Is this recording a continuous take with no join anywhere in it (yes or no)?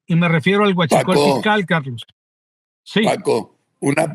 yes